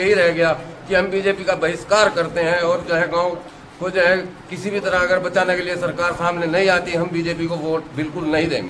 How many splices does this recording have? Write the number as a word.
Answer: zero